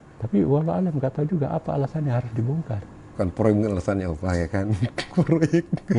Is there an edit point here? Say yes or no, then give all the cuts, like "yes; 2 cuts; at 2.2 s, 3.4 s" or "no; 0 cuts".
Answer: no; 0 cuts